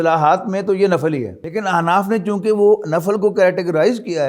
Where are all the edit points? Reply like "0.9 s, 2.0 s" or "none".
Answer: 1.4 s